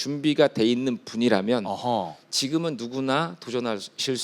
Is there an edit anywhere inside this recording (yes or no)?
no